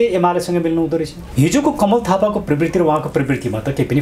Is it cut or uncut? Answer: cut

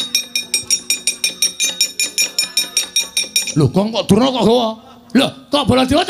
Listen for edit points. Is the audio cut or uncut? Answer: uncut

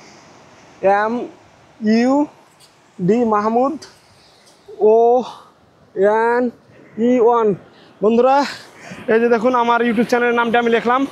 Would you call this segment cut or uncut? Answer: uncut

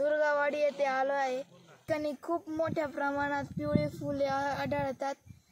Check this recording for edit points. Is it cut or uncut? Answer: cut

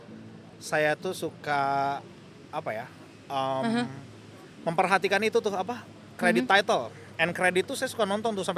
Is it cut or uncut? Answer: uncut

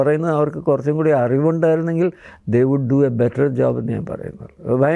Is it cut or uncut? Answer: uncut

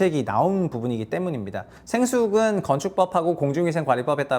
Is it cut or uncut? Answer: uncut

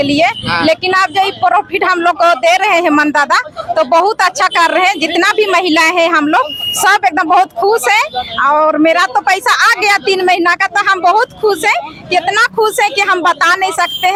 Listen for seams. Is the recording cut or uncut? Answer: uncut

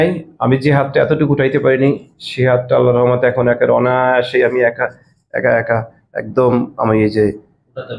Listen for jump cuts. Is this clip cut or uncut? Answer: uncut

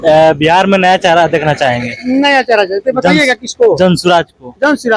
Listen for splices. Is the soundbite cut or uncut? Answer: uncut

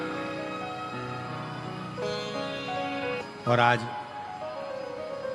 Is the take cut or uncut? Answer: cut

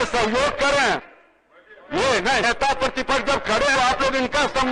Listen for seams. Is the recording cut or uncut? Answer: uncut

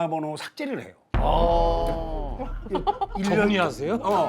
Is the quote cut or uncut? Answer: cut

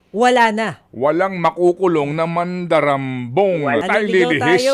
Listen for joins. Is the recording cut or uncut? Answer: cut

